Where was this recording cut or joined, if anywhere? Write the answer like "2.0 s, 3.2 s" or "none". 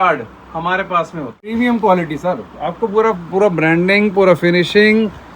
1.5 s